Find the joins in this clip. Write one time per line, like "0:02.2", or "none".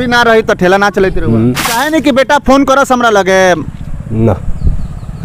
0:01.8